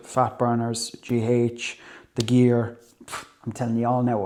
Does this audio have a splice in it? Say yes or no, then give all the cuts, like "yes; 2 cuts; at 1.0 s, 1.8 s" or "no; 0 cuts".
no; 0 cuts